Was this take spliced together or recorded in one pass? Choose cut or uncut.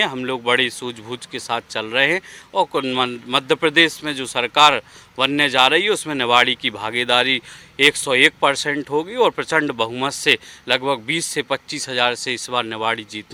uncut